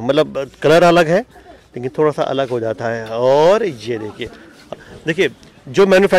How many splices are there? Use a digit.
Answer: 1